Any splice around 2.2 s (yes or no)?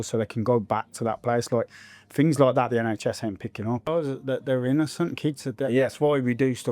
no